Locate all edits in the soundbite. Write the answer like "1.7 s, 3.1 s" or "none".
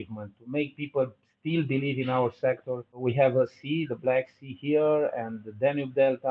3.0 s